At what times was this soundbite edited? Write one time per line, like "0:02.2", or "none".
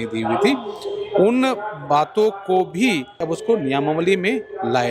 0:03.2